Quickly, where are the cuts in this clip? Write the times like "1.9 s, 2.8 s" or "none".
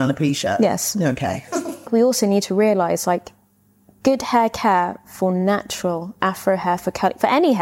1.9 s